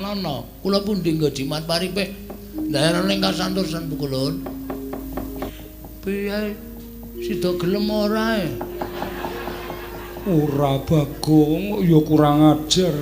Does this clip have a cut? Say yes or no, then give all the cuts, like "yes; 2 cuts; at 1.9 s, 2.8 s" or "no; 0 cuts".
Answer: yes; 1 cut; at 5.5 s